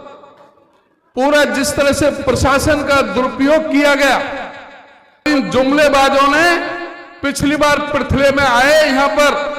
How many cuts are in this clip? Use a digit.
1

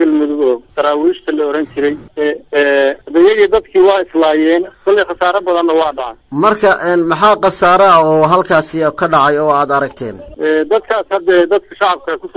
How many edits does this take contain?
0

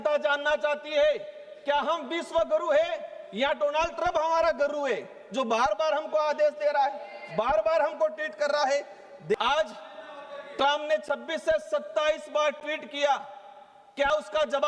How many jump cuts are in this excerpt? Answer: 1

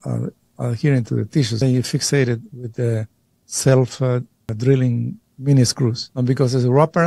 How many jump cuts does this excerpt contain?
3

